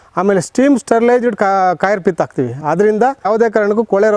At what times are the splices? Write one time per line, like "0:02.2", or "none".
0:03.3